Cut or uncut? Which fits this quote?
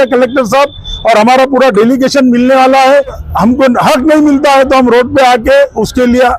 cut